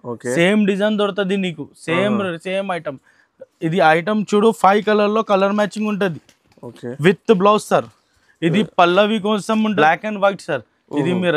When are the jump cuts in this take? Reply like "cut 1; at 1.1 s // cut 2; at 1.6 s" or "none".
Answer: cut 1; at 9.8 s